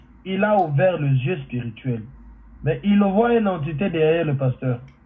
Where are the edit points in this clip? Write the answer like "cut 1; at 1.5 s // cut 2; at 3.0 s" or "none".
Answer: none